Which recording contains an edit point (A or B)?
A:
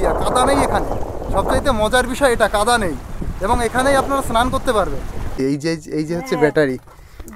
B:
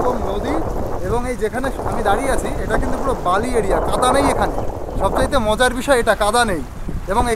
A